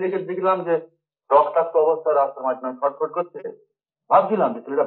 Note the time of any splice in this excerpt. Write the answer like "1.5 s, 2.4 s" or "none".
none